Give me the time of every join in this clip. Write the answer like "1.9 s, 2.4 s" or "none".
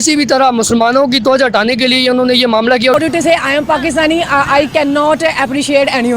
2.9 s